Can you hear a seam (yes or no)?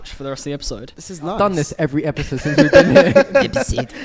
no